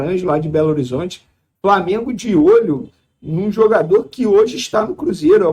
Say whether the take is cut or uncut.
uncut